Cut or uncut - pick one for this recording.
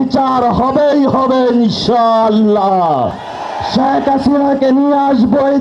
cut